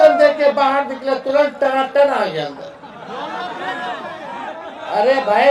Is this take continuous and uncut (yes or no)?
yes